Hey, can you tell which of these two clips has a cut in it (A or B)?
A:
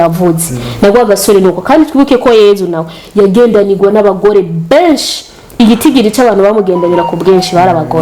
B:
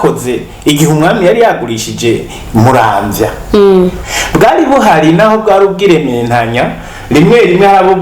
B